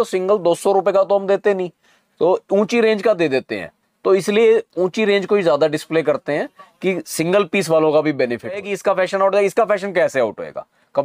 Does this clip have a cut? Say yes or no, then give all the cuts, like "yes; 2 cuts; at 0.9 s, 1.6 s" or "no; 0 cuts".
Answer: yes; 1 cut; at 8.7 s